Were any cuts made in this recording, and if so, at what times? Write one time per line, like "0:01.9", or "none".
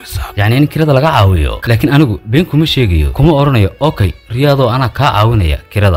0:01.5

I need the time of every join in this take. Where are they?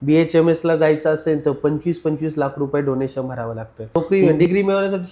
0:03.9

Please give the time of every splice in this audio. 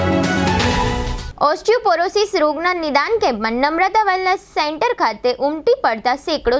0:01.1

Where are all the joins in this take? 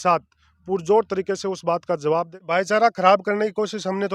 0:02.3

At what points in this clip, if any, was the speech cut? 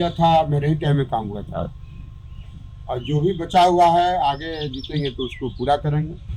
none

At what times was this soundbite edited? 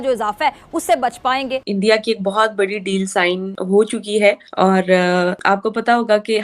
0:01.7
0:03.5
0:04.5
0:05.4

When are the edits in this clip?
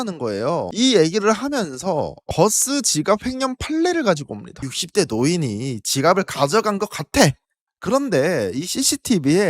0:04.5

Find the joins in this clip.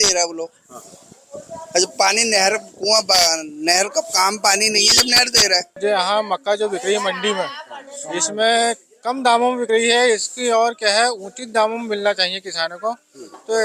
0:05.8

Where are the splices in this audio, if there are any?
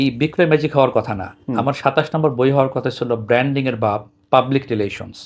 none

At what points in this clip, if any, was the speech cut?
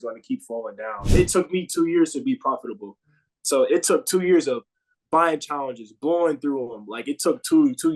0:00.9

